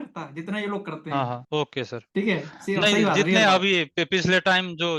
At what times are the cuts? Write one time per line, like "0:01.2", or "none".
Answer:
0:01.4

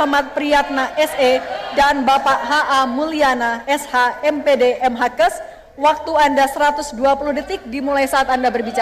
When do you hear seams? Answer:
0:06.8

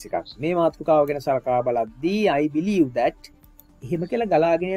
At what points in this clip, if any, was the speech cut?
none

